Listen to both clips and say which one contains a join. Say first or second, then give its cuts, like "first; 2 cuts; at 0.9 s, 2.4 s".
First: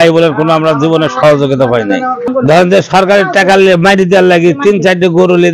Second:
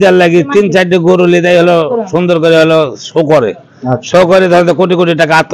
first; 1 cut; at 2.3 s